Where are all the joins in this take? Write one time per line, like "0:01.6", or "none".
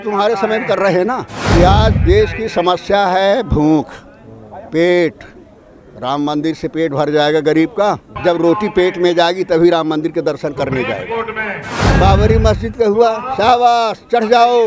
0:01.3
0:08.1
0:11.8